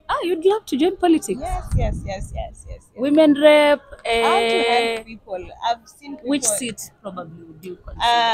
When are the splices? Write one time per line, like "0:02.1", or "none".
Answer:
none